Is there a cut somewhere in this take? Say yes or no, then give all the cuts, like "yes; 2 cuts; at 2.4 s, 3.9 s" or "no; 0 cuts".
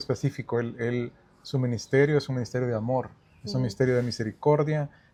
no; 0 cuts